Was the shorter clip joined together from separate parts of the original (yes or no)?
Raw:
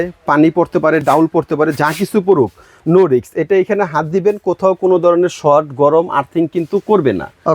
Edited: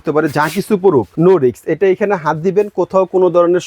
yes